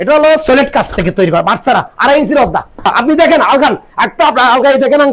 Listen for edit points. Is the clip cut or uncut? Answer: cut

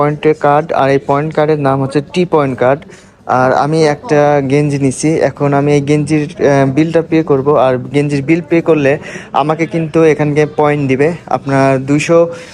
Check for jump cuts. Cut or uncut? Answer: uncut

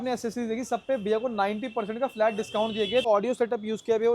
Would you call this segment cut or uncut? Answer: cut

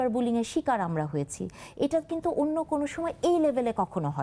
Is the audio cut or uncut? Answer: uncut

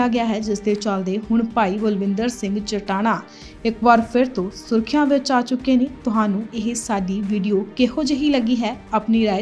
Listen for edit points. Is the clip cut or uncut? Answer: cut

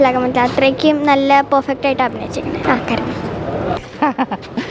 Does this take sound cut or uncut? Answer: cut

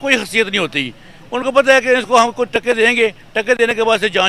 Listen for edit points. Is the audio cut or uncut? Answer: uncut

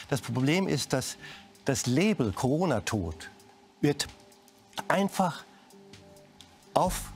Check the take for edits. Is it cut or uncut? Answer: uncut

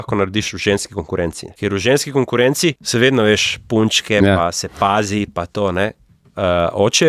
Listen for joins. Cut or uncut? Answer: cut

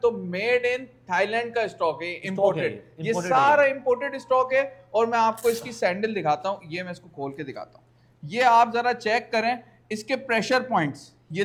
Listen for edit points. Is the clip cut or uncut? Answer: uncut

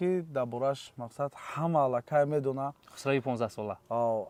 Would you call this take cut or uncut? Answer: uncut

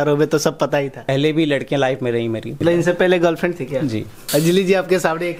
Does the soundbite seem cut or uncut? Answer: cut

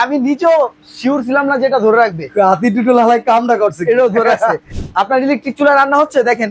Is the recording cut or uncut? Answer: cut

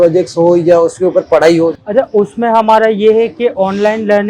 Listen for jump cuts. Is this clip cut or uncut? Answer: cut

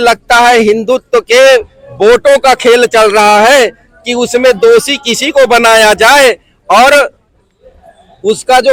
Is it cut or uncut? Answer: uncut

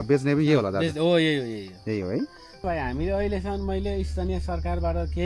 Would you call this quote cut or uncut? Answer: cut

